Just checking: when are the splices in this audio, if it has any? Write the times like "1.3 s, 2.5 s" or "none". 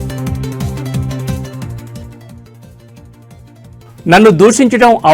3.7 s